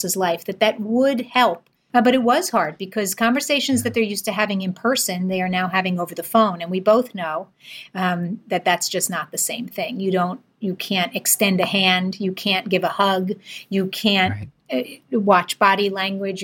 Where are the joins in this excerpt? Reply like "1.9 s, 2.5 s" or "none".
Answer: 1.7 s